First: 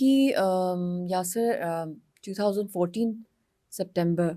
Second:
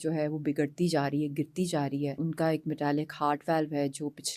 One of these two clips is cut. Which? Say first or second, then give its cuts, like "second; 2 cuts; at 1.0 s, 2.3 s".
second; 1 cut; at 2.2 s